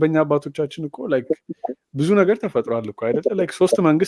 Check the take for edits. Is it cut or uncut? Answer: uncut